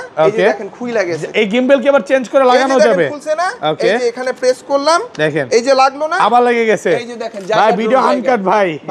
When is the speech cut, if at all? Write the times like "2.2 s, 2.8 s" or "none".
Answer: none